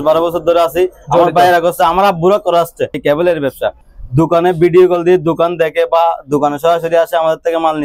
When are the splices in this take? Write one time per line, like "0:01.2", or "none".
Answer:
0:03.0
0:03.8